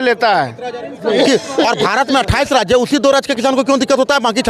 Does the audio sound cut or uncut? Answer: cut